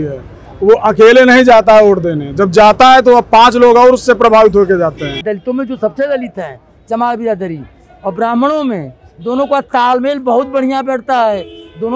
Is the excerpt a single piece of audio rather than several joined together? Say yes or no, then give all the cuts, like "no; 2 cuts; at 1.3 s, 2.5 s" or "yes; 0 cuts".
no; 1 cut; at 5.3 s